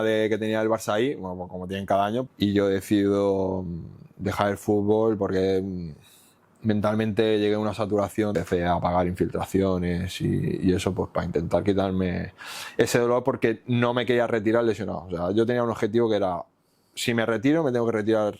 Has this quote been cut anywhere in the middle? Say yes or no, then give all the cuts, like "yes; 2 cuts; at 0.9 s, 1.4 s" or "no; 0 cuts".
yes; 2 cuts; at 2.2 s, 8.3 s